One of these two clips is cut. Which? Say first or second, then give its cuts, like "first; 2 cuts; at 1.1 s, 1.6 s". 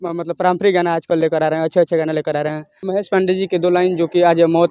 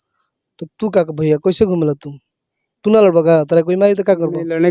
first; 1 cut; at 2.8 s